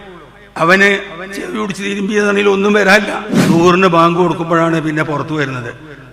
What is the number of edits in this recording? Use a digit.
1